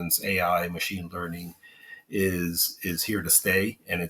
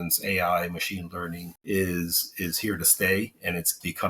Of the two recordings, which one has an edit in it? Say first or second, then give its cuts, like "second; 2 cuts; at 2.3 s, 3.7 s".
second; 1 cut; at 1.5 s